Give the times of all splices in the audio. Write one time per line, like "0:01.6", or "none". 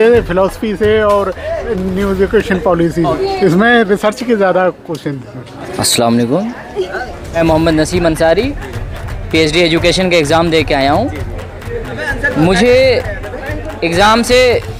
none